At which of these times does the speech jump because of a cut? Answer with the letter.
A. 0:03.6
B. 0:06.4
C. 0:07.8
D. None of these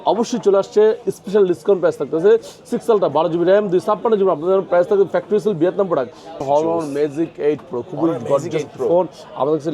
B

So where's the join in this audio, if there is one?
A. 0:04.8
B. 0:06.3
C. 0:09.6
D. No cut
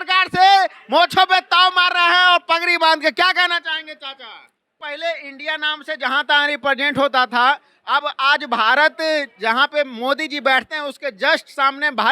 A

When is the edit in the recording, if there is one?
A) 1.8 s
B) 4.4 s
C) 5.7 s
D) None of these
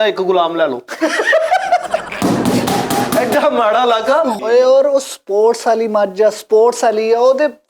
B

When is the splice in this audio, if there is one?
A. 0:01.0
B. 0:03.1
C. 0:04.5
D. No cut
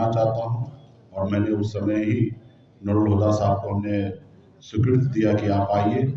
D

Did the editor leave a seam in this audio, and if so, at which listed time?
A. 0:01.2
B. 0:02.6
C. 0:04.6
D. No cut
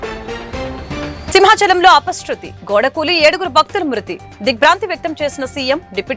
A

